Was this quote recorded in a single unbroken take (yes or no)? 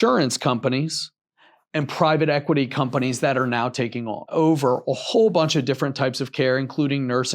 no